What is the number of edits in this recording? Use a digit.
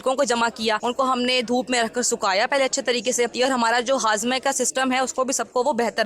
2